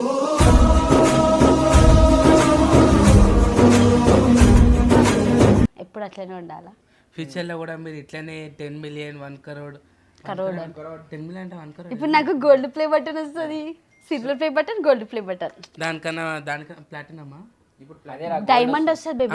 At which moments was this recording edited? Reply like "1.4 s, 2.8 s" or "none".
none